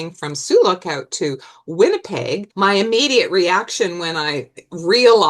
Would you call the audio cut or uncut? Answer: cut